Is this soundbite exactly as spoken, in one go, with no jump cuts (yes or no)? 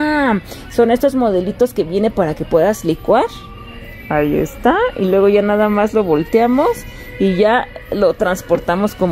yes